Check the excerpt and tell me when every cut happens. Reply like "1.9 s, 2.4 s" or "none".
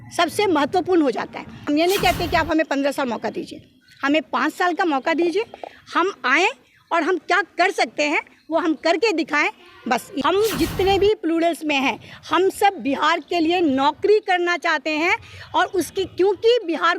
1.6 s, 10.1 s